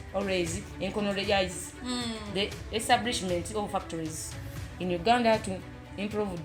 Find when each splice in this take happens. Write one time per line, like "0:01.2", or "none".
none